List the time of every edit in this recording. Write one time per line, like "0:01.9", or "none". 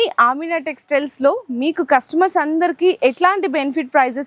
none